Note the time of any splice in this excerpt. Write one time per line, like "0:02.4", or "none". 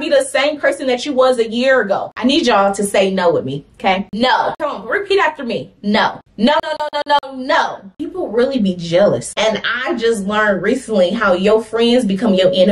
0:02.1
0:08.0